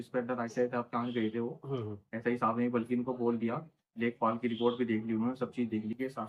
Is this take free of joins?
yes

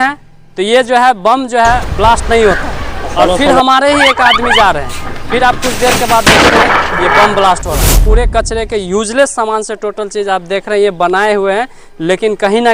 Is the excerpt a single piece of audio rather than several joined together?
no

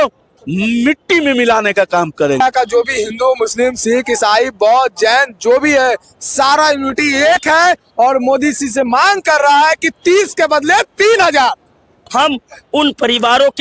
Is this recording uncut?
no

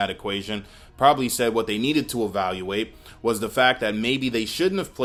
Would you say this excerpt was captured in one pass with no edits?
yes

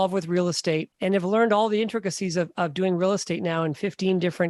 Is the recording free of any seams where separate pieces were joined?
no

